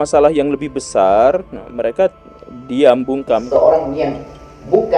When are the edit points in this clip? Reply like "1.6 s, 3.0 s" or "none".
3.4 s